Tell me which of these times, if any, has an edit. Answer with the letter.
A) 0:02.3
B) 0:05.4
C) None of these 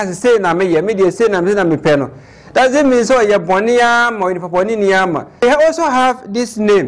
B